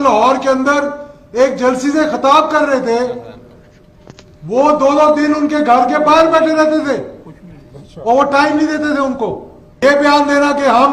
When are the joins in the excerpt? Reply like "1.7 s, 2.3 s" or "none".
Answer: 9.8 s